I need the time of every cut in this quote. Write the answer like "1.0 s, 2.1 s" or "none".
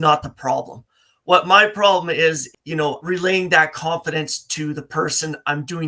3.0 s